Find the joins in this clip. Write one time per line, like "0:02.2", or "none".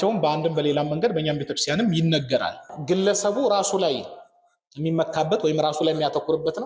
0:02.7